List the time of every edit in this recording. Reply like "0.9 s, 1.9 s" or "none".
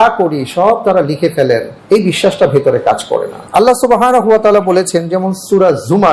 1.7 s, 3.4 s